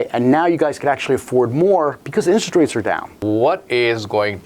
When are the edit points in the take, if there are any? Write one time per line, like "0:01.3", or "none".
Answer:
0:03.1